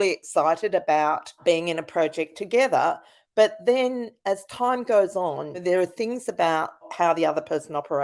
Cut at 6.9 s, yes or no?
yes